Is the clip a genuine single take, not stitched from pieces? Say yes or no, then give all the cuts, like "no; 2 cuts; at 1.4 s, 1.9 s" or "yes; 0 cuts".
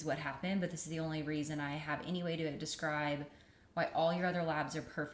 yes; 0 cuts